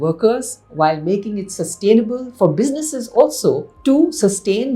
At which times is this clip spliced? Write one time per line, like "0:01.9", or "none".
0:03.7